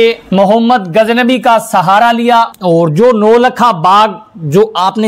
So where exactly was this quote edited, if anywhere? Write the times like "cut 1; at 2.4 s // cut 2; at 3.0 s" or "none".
cut 1; at 2.5 s